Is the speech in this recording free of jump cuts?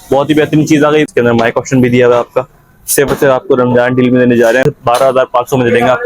no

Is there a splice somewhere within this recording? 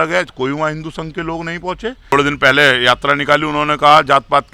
yes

